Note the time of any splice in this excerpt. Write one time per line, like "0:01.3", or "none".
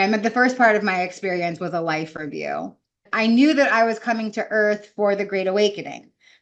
0:03.1